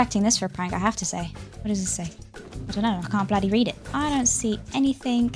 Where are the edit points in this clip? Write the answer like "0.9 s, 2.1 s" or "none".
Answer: 1.4 s, 3.8 s